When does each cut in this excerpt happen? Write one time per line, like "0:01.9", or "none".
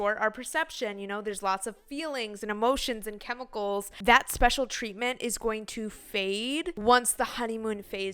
0:03.9
0:06.8